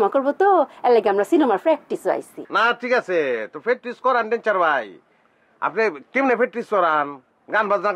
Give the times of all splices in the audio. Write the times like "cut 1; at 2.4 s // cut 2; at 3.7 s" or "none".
cut 1; at 2.4 s